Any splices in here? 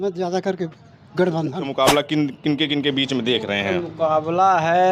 yes; 1 cut; at 1.7 s

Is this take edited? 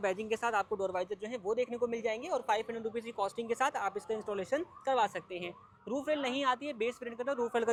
no; 0 cuts

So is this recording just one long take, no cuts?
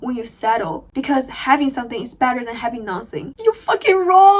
yes; 0 cuts

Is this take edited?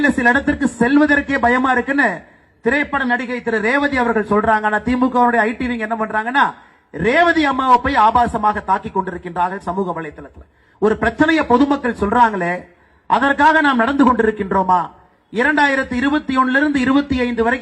yes; 1 cut; at 12.4 s

